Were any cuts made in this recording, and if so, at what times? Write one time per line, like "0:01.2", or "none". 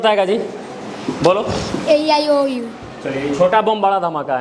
none